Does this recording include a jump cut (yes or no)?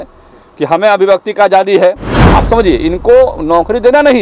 yes